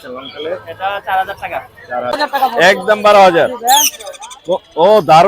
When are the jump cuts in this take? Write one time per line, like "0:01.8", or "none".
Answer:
0:02.2

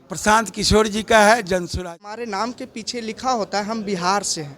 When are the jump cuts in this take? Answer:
0:01.8

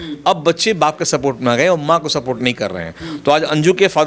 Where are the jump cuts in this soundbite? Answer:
none

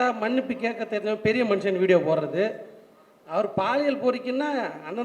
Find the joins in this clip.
none

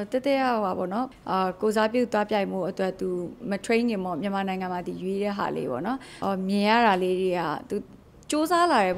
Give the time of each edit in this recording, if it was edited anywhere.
0:01.1
0:06.1

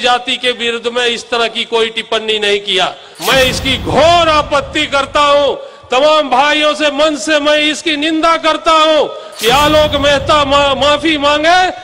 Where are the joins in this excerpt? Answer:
0:03.1

